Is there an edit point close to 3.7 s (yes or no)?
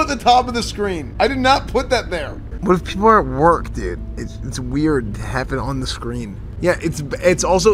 no